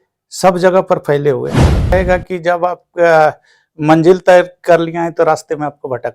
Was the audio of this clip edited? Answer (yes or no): yes